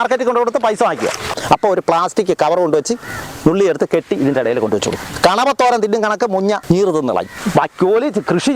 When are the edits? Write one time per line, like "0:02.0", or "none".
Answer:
0:01.3
0:05.1
0:06.6
0:07.4